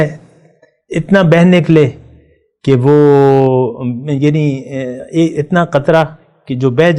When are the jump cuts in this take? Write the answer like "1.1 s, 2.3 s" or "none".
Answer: none